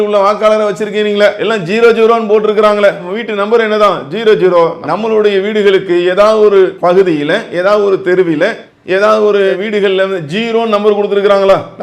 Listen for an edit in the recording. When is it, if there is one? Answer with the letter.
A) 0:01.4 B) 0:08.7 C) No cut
A